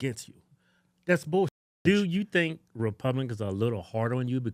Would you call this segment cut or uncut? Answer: cut